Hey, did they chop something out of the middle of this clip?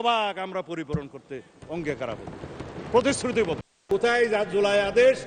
yes; 1 cut; at 3.7 s

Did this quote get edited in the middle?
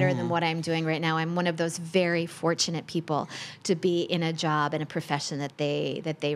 no; 0 cuts

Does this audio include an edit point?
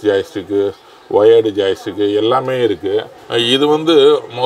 yes; 1 cut; at 3.1 s

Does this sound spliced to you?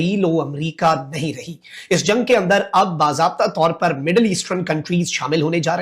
no; 0 cuts

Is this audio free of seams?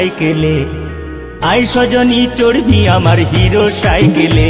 yes; 0 cuts

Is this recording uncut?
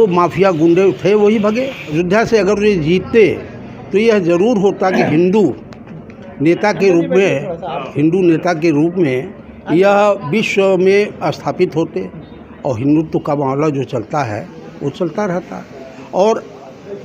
no; 1 cut; at 1.8 s

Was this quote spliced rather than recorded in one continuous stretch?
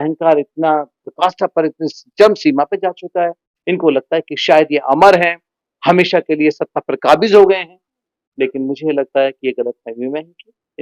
no; 0 cuts

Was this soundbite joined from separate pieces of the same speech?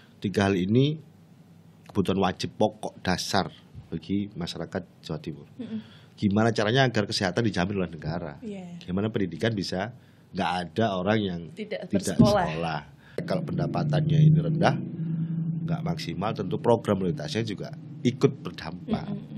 yes; 1 cut; at 13.2 s

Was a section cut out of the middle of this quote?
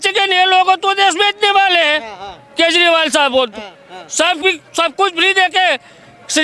no; 0 cuts

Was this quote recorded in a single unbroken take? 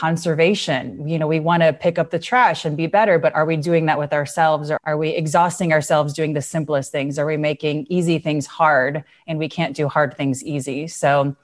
no; 1 cut; at 4.8 s

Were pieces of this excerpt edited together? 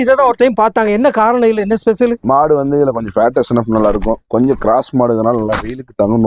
no; 0 cuts

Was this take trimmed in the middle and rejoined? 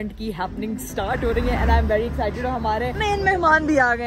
no; 0 cuts

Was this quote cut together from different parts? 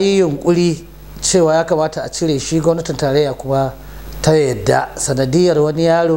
no; 0 cuts

